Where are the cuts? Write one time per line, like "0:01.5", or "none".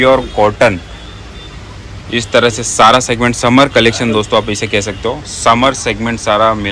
none